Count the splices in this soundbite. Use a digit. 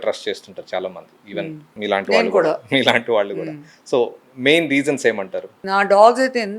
2